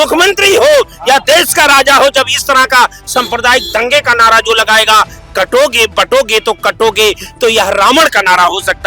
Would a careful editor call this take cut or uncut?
uncut